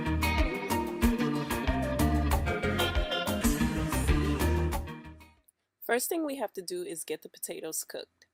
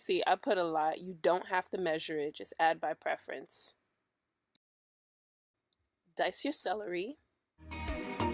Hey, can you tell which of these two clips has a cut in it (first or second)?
first